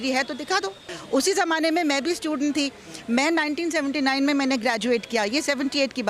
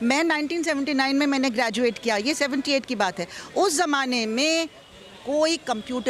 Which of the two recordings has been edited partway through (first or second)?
first